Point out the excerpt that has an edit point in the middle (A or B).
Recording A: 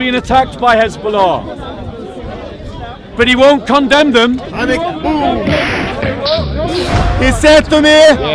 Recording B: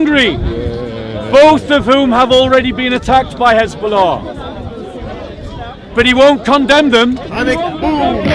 A